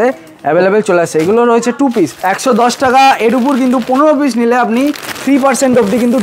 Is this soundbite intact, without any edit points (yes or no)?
no